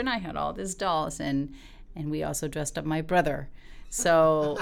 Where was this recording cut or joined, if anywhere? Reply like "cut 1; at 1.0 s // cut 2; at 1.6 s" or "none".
none